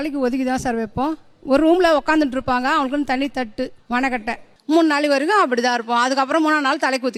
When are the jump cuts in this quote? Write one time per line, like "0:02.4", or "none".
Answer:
none